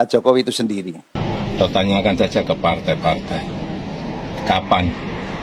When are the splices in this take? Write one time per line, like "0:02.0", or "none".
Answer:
0:01.2